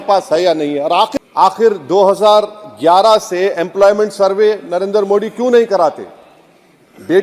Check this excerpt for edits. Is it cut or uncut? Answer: cut